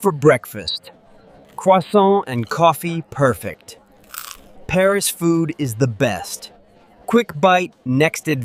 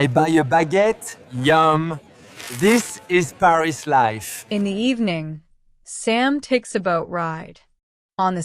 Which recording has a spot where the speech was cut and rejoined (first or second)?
second